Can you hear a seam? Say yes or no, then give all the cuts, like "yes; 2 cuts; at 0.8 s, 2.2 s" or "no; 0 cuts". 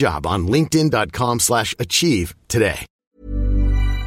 yes; 1 cut; at 2.9 s